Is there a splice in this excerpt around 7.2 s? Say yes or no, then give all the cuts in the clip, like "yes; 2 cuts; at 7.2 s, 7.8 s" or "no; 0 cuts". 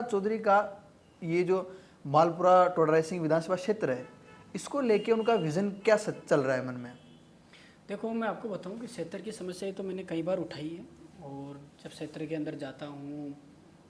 no; 0 cuts